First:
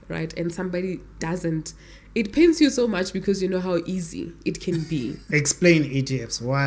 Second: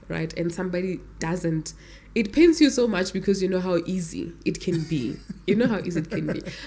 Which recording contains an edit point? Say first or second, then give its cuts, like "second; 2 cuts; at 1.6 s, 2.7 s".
first; 1 cut; at 5.2 s